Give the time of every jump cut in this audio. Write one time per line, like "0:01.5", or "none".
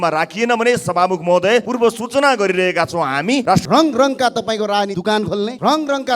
0:01.7
0:03.5
0:05.2

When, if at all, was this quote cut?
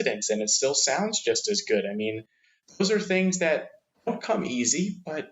0:03.9

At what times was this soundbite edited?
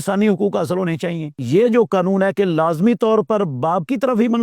0:01.4

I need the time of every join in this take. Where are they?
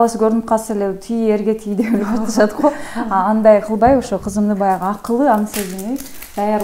none

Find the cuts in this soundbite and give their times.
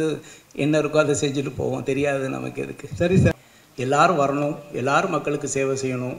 0:03.3

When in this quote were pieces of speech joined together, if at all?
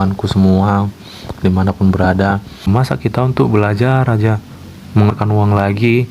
0:02.6

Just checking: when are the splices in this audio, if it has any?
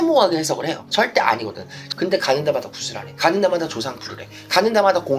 0:02.0

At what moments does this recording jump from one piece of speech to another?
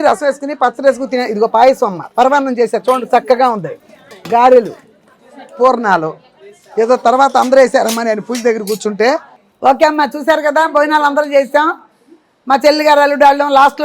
0:09.4

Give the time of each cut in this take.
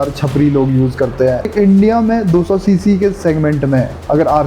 0:01.5

